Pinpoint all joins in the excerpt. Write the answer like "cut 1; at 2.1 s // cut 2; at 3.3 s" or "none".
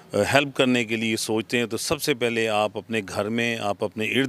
none